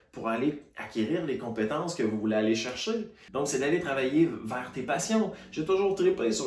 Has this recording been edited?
yes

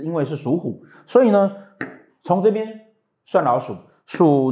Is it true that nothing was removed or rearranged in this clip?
yes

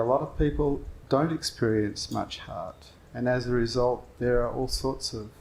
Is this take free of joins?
no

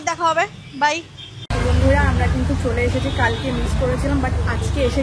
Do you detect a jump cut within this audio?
yes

